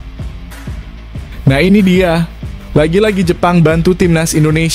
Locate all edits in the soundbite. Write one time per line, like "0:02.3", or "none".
0:01.4